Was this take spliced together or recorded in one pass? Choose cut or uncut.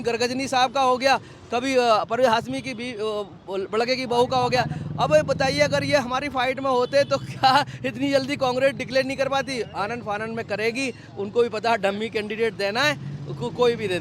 uncut